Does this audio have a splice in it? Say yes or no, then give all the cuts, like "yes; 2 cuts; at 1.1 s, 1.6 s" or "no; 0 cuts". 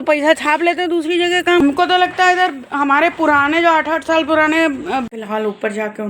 yes; 2 cuts; at 1.6 s, 5.1 s